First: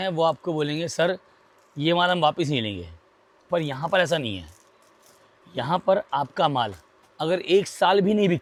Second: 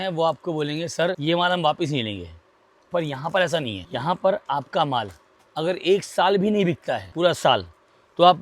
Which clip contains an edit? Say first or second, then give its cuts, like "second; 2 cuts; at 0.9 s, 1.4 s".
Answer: second; 3 cuts; at 1.2 s, 3.8 s, 7.1 s